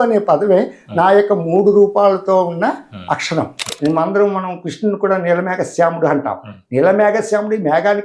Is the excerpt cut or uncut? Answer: cut